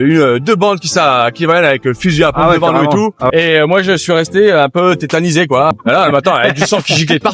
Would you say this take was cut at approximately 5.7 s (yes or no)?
yes